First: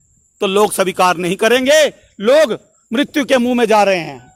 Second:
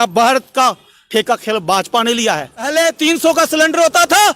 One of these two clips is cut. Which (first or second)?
second